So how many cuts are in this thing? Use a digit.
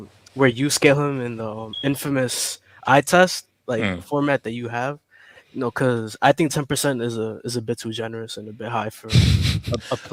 0